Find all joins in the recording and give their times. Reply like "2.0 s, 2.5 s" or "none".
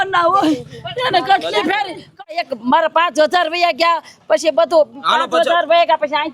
2.4 s